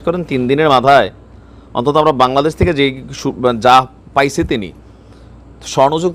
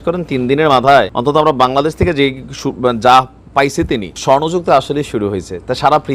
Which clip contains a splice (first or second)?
second